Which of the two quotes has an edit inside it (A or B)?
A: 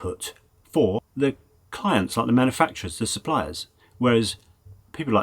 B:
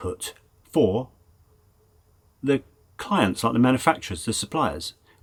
A